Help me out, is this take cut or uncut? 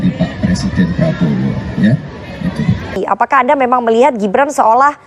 cut